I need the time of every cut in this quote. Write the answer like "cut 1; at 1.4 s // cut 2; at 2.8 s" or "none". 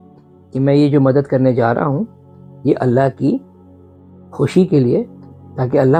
none